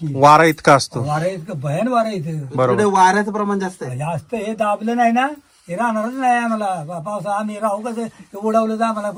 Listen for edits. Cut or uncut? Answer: uncut